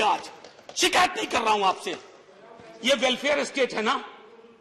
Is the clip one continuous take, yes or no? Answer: yes